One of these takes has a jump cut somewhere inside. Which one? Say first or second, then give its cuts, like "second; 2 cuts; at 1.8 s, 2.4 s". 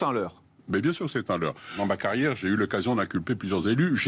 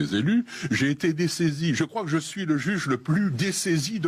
first; 1 cut; at 1.8 s